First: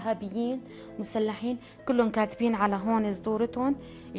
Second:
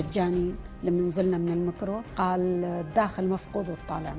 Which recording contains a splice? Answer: second; 1 cut; at 2.1 s

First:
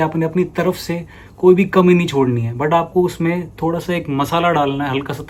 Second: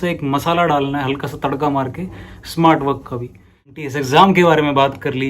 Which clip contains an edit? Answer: second; 1 cut; at 3.7 s

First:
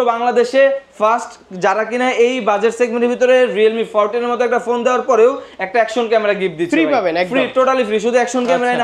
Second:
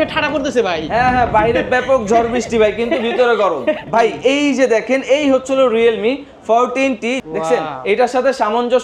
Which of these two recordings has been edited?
second; 2 cuts; at 3.8 s, 7.2 s

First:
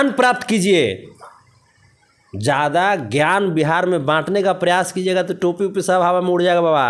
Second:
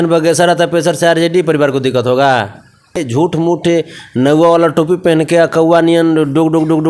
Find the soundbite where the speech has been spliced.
second; 1 cut; at 3.0 s

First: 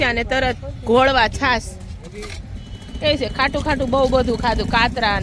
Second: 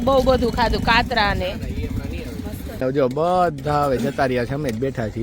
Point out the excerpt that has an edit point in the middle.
second; 1 cut; at 2.8 s

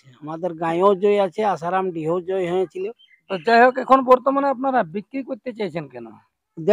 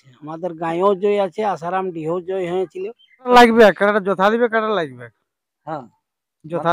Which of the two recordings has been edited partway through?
second; 1 cut; at 3.3 s

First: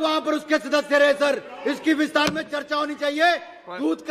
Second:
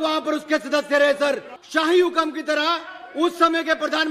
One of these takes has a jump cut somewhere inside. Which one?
second; 1 cut; at 1.5 s

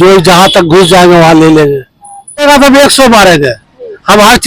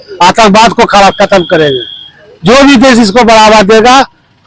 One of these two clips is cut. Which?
first; 1 cut; at 2.4 s

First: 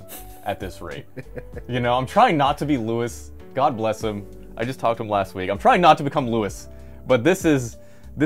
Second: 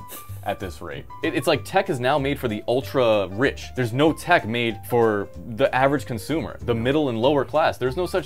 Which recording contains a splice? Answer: second; 3 cuts; at 1.0 s, 3.7 s, 5.1 s

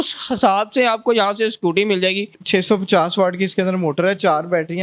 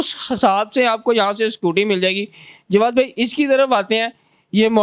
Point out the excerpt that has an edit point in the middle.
first; 1 cut; at 2.4 s

